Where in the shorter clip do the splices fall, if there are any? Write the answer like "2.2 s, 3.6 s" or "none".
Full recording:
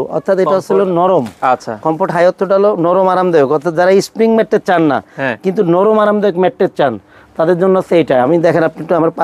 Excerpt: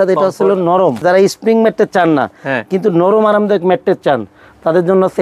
1.0 s